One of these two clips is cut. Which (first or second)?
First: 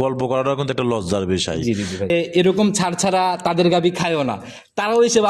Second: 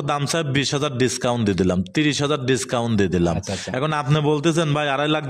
first